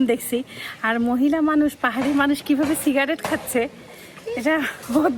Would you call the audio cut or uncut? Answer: uncut